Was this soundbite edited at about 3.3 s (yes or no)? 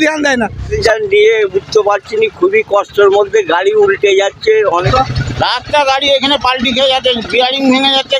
no